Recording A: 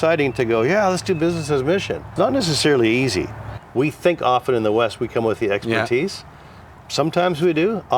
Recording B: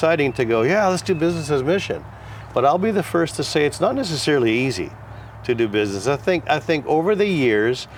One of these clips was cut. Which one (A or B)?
A